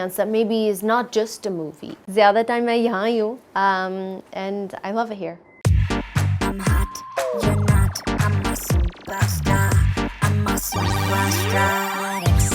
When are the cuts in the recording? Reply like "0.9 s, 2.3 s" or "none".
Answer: 2.0 s, 5.6 s